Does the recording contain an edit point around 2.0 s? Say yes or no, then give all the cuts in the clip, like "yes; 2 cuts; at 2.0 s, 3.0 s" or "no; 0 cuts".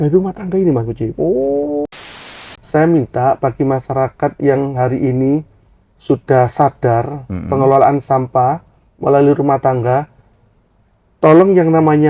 yes; 1 cut; at 2.0 s